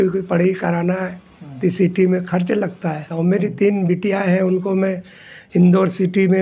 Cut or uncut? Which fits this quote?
cut